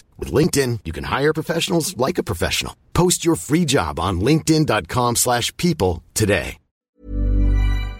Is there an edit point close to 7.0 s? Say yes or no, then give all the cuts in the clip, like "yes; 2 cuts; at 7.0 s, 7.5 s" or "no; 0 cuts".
yes; 1 cut; at 7.0 s